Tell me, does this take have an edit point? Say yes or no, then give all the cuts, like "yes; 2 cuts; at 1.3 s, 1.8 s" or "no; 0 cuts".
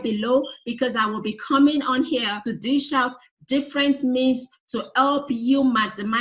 yes; 1 cut; at 2.5 s